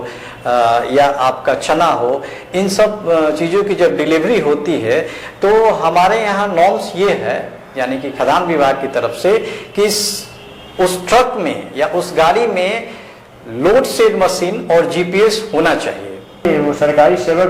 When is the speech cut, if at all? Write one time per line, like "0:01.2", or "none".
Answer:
0:16.4